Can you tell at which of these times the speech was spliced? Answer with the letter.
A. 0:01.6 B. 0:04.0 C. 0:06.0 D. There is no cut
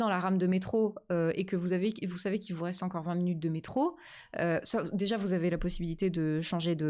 D